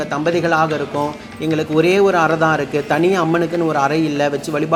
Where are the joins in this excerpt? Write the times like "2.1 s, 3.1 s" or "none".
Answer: none